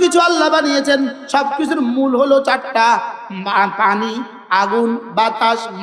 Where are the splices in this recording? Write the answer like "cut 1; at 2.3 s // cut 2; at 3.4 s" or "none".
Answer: none